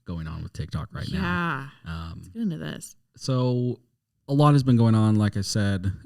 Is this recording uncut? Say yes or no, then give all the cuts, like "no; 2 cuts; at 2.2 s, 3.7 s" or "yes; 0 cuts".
yes; 0 cuts